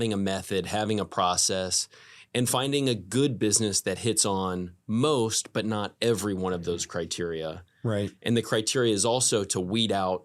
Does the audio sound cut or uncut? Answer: uncut